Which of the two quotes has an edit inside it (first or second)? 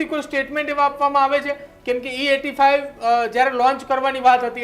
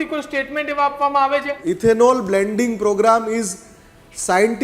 second